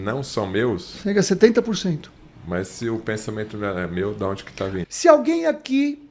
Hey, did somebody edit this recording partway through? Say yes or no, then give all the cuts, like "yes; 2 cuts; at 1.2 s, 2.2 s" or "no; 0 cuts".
yes; 1 cut; at 4.8 s